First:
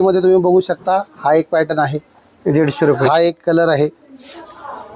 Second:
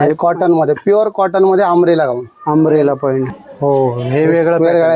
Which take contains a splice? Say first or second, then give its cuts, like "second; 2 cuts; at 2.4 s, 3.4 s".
second; 1 cut; at 3.3 s